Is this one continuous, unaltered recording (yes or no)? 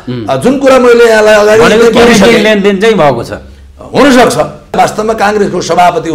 no